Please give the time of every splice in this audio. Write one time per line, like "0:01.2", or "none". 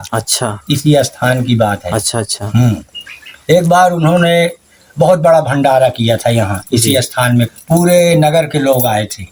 0:07.5